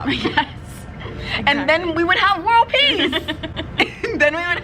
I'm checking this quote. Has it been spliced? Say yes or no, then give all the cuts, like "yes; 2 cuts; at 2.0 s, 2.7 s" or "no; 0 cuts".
no; 0 cuts